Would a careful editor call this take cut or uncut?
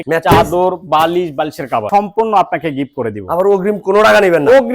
cut